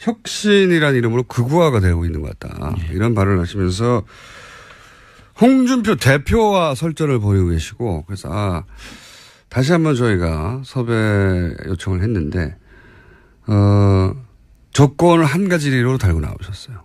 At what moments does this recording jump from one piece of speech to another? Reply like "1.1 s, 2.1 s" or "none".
none